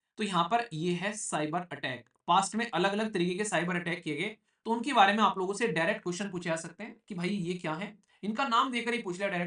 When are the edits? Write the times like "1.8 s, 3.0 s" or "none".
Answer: none